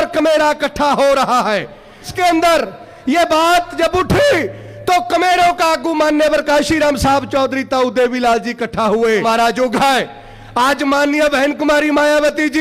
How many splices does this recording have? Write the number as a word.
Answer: two